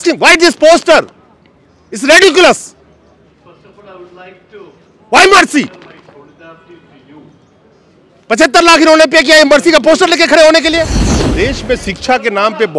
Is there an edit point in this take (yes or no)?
yes